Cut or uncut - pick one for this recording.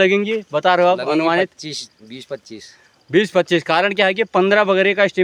uncut